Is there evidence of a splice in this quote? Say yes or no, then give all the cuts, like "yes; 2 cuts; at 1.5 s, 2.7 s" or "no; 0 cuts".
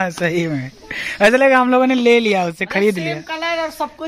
no; 0 cuts